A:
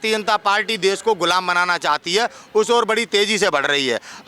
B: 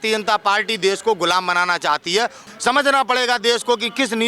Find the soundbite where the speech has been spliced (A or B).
B